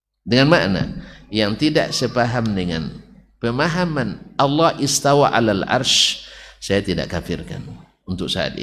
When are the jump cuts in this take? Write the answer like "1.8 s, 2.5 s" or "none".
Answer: none